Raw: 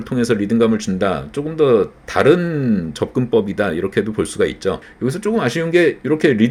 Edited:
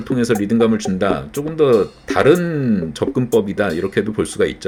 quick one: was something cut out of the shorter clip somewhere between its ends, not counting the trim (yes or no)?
no